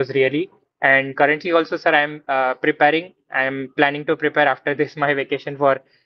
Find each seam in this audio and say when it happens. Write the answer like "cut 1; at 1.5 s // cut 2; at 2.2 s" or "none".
none